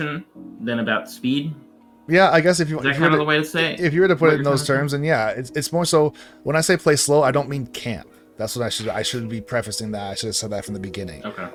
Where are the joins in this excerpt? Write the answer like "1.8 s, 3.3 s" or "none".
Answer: none